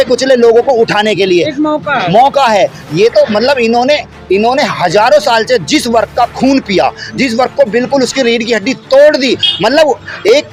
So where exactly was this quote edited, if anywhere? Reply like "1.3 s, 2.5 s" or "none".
none